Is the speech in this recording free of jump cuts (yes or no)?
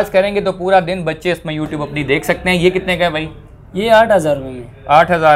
yes